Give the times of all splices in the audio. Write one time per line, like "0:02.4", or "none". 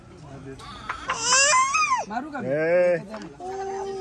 none